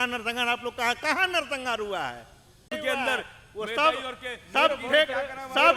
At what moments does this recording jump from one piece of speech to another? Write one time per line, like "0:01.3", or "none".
0:02.7